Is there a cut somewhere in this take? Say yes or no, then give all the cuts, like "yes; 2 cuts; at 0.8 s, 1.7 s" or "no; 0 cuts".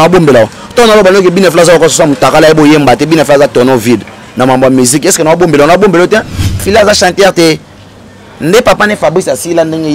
yes; 1 cut; at 6.6 s